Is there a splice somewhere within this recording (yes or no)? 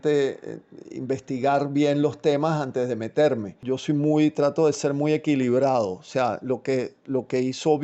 yes